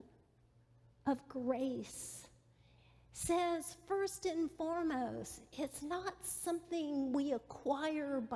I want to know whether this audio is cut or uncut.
uncut